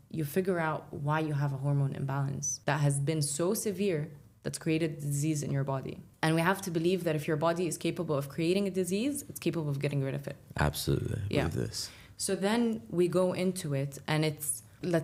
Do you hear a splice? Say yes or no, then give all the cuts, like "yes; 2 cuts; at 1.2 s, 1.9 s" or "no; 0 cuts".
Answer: no; 0 cuts